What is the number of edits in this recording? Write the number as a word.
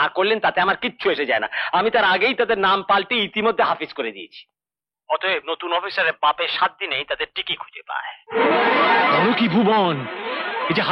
one